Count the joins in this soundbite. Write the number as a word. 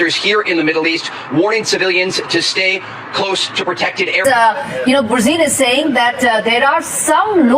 one